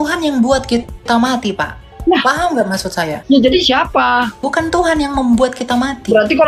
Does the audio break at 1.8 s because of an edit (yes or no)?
no